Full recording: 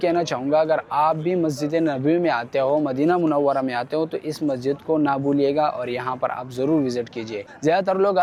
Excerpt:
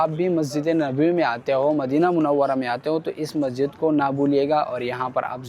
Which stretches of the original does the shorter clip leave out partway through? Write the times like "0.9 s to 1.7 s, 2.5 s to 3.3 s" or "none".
none